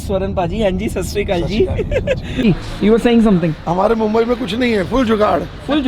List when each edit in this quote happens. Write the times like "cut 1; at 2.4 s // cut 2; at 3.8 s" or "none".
cut 1; at 2.3 s